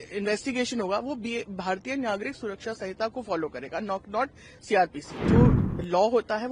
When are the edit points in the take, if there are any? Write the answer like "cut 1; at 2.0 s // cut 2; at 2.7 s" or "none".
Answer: cut 1; at 5.2 s